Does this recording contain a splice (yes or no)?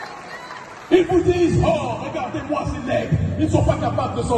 no